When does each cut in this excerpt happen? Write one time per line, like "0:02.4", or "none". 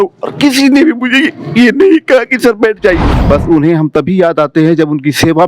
0:03.2